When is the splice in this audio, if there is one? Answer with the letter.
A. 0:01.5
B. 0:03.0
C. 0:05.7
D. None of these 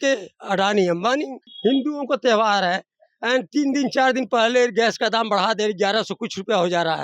A